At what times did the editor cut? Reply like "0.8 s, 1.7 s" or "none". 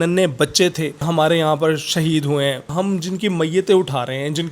1.1 s, 2.7 s